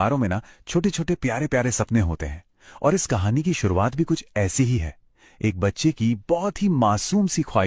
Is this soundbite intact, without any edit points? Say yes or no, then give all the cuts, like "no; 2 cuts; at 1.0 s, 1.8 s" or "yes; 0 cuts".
yes; 0 cuts